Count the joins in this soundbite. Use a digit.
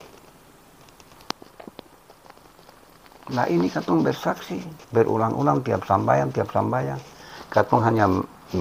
1